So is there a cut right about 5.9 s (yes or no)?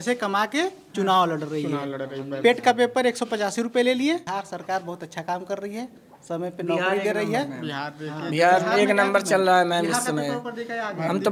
no